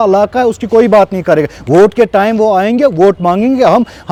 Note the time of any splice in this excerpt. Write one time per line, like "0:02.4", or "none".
none